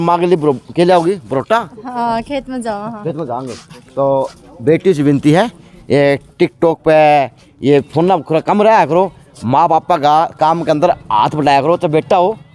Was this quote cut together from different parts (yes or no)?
no